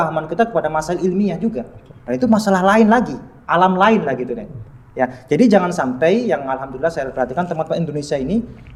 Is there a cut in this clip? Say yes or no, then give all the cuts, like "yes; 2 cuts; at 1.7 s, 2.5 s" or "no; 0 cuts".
no; 0 cuts